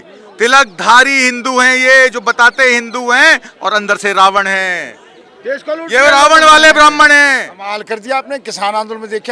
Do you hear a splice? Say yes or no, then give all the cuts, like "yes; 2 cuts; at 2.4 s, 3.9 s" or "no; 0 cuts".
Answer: yes; 1 cut; at 7.5 s